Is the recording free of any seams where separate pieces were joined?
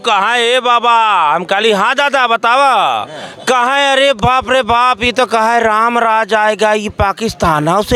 yes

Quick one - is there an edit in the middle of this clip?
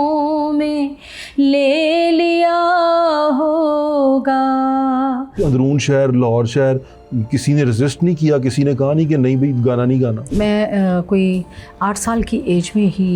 yes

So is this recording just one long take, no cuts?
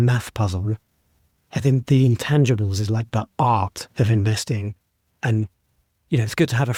yes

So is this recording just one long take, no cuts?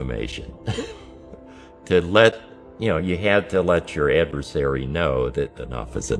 yes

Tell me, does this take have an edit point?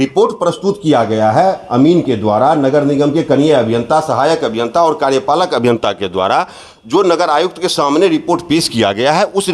no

